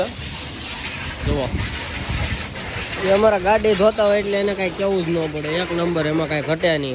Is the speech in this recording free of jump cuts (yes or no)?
yes